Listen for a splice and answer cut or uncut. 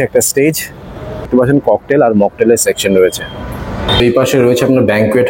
cut